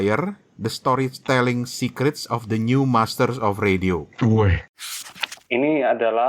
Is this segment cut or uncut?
cut